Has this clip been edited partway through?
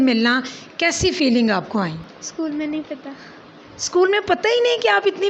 yes; 1 cut; at 2.1 s

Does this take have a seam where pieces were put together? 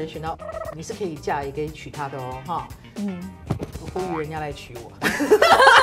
no; 0 cuts

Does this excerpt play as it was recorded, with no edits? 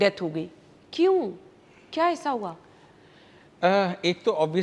yes; 0 cuts

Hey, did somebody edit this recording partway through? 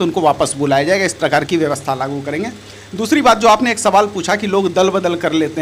no; 0 cuts

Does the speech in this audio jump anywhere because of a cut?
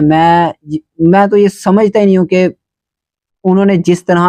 no; 0 cuts

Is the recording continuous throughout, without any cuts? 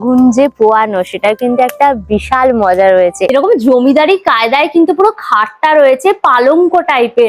no; 1 cut; at 3.3 s

